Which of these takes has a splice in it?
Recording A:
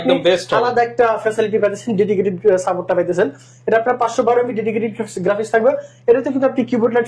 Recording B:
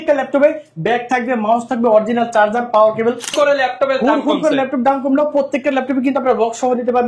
B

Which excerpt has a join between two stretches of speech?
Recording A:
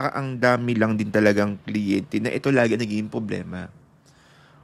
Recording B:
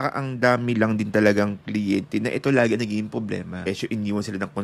B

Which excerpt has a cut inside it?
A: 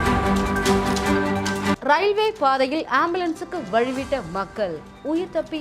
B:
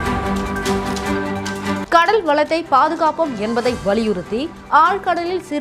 B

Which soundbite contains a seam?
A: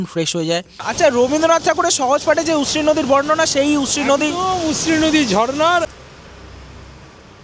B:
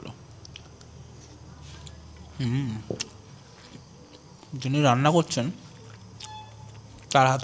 A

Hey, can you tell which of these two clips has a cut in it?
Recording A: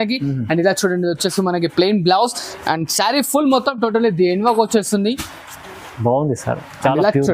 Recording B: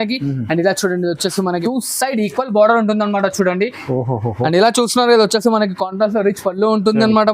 B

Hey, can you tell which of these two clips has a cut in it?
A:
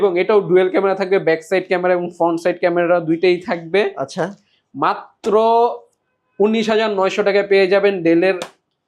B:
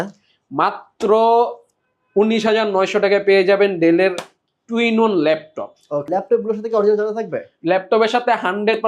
B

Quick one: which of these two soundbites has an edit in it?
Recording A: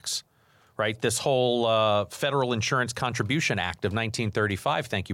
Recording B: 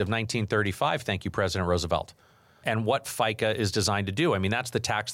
B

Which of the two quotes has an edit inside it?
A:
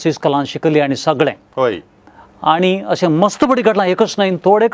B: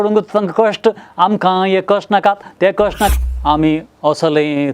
B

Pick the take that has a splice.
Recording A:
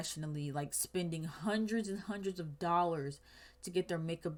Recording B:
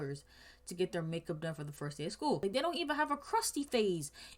B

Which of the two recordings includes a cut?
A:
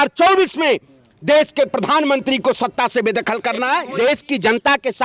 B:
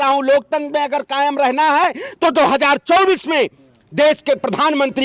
A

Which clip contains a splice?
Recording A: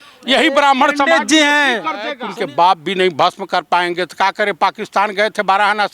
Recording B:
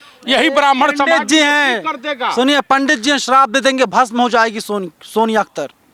A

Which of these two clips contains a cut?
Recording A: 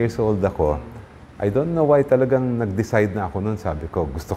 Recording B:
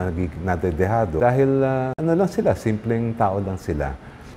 B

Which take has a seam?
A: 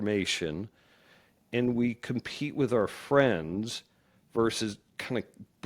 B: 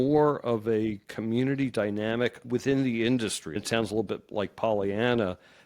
B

